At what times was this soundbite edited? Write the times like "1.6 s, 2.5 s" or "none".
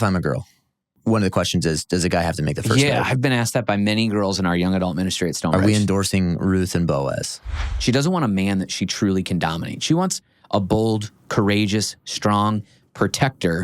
0.9 s, 7.5 s